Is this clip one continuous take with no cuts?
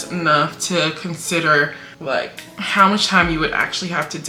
yes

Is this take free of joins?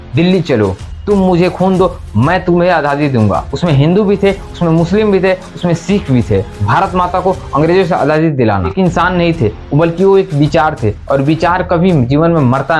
no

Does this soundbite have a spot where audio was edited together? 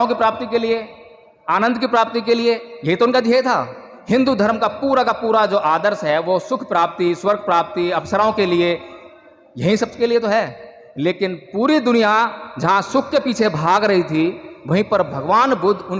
no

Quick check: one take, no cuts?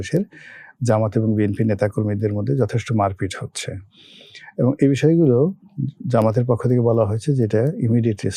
yes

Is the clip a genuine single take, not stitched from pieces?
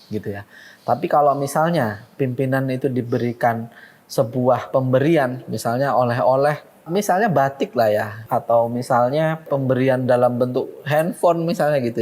no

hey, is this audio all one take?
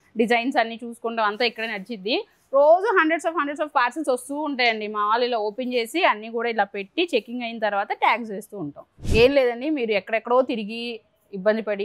no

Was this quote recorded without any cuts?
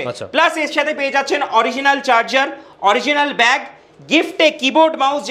yes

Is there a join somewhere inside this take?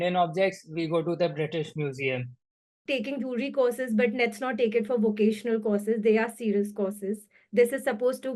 yes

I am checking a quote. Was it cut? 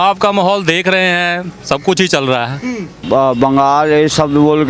yes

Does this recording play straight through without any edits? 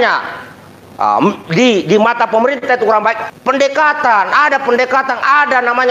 no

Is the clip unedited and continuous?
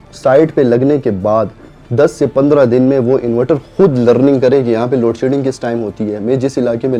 yes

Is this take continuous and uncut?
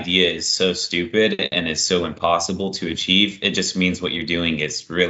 yes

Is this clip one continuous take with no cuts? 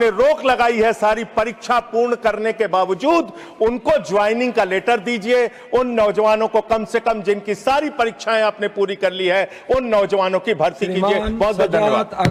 yes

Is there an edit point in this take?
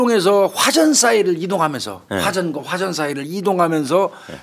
no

